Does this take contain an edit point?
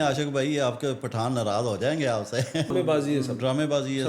yes; 1 cut; at 2.7 s

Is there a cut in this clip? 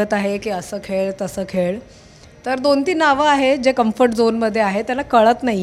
no; 0 cuts

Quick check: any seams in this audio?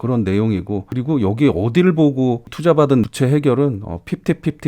yes; 1 cut; at 3.0 s

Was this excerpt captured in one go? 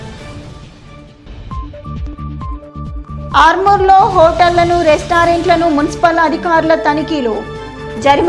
yes; 0 cuts

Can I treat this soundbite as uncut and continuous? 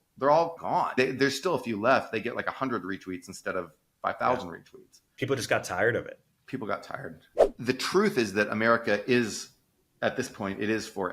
no; 1 cut; at 7.3 s

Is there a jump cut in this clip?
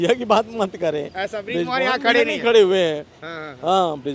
no; 0 cuts

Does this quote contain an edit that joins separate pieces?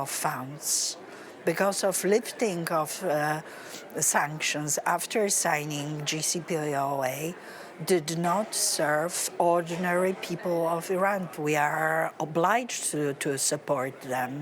yes; 1 cut; at 11.3 s

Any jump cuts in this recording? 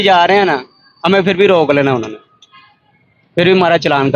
no; 0 cuts

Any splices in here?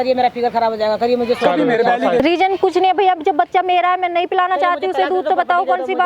yes; 1 cut; at 2.2 s

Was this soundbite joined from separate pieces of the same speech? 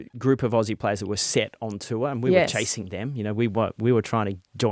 no; 0 cuts

